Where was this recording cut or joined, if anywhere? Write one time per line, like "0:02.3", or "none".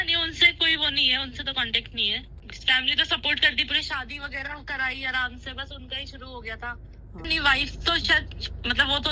0:02.3
0:07.2